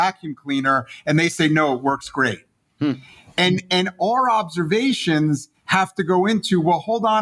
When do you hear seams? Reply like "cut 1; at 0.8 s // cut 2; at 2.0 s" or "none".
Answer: none